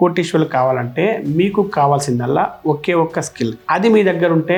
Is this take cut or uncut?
uncut